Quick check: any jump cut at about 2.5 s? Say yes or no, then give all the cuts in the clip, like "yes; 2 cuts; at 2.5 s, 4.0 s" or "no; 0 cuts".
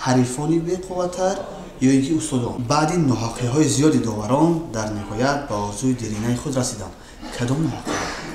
yes; 1 cut; at 2.5 s